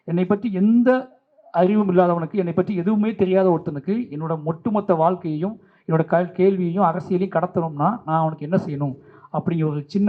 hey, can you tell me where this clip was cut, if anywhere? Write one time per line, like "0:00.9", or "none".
none